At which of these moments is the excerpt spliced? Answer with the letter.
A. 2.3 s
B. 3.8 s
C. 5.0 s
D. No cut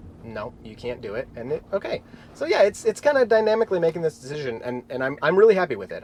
D